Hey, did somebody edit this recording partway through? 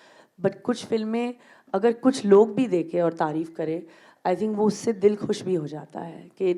no; 0 cuts

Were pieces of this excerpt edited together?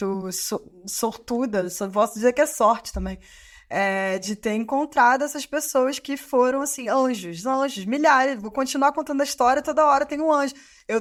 no; 0 cuts

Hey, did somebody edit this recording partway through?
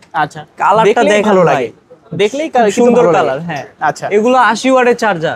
no; 0 cuts

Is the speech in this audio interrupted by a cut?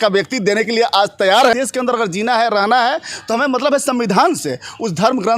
yes; 1 cut; at 1.5 s

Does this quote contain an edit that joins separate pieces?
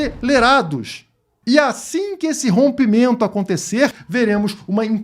yes; 1 cut; at 4.0 s

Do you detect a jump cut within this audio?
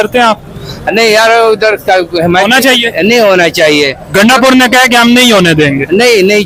no; 0 cuts

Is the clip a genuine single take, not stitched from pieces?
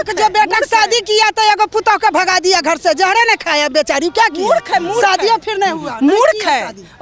yes; 0 cuts

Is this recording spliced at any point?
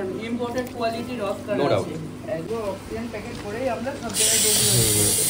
yes; 1 cut; at 2.5 s

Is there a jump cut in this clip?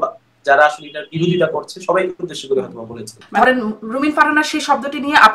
yes; 1 cut; at 3.2 s

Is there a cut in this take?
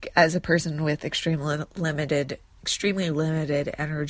no; 0 cuts

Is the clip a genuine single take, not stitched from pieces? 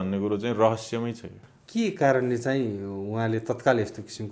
yes; 0 cuts

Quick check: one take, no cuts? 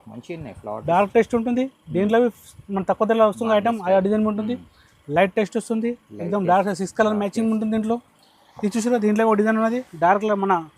yes; 0 cuts

